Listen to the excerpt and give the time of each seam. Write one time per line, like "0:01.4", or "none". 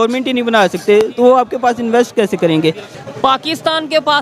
0:02.9